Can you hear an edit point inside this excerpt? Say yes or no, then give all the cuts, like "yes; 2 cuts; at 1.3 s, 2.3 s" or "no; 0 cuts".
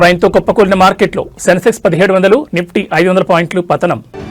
no; 0 cuts